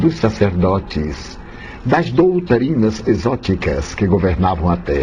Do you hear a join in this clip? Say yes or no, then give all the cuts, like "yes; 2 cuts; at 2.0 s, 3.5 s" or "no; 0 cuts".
no; 0 cuts